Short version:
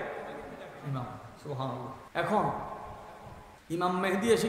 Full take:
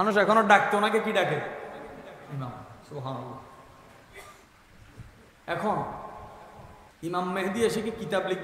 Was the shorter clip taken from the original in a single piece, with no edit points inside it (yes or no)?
no